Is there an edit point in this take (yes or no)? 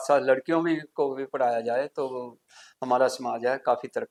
no